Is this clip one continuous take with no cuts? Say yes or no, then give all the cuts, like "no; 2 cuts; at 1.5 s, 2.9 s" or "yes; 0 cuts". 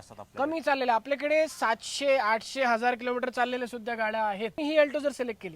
no; 1 cut; at 4.6 s